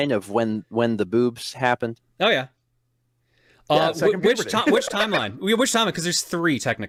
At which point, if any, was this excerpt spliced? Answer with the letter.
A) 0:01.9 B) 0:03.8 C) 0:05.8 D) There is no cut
D